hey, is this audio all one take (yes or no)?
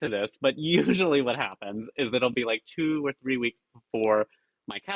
yes